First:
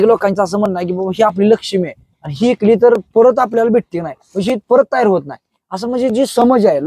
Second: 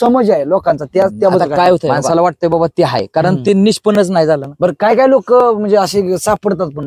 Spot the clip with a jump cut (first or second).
second